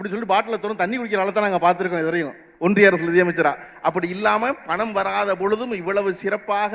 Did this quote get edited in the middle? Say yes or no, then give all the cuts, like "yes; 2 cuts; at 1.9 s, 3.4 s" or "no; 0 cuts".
no; 0 cuts